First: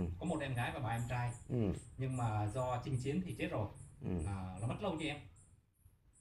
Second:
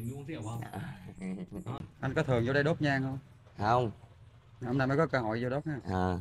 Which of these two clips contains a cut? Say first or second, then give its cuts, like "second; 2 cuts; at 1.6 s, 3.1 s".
second; 1 cut; at 1.8 s